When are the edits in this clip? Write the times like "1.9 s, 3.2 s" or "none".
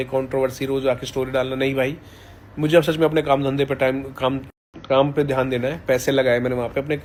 none